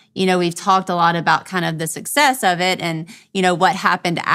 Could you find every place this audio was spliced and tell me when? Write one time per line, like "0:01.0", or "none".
none